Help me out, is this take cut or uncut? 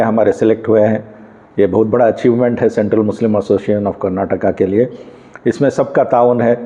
uncut